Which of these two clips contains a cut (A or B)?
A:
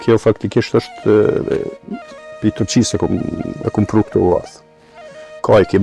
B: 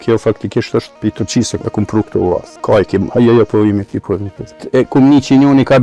B